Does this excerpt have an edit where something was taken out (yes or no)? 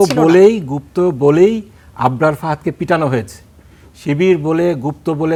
no